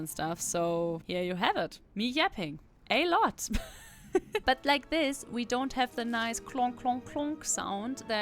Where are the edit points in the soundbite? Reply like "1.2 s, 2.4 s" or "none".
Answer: 1.0 s, 1.8 s, 4.4 s